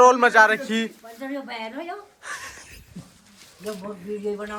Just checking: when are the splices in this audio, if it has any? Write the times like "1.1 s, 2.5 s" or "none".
none